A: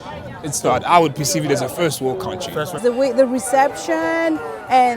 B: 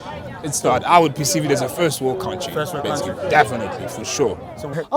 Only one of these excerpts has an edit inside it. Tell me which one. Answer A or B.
A